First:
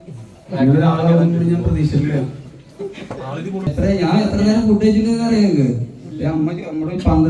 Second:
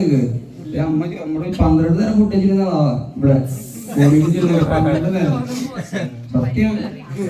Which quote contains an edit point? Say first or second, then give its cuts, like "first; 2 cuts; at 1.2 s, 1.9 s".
first; 1 cut; at 3.7 s